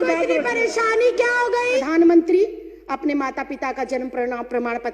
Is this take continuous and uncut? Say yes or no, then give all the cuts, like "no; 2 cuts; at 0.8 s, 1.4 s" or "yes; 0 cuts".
no; 1 cut; at 1.8 s